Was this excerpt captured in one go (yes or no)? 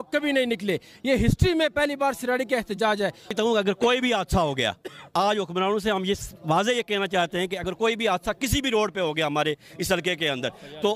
no